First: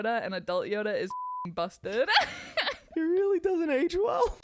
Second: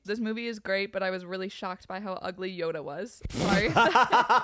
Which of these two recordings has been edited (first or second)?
first